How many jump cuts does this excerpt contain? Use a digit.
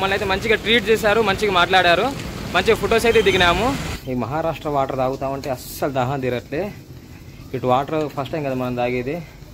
1